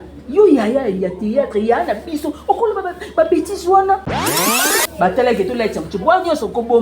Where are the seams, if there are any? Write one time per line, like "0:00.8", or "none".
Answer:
0:04.6